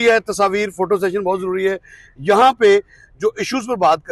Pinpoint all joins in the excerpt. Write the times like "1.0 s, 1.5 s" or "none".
none